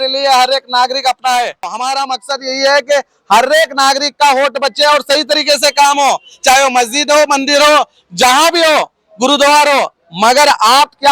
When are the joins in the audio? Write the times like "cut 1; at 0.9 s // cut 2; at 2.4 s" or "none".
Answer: cut 1; at 1.7 s